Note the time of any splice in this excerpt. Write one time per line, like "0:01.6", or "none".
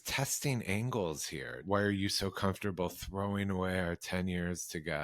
0:01.6